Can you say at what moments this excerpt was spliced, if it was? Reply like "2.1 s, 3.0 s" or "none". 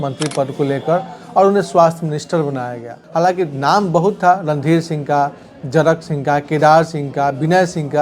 3.0 s